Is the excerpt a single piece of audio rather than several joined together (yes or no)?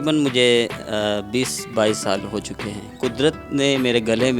no